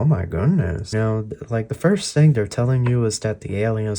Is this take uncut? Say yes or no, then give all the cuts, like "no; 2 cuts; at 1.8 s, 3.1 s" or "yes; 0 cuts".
no; 1 cut; at 0.9 s